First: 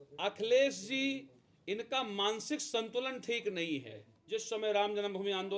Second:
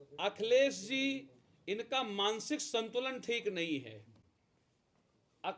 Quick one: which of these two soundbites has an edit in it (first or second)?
first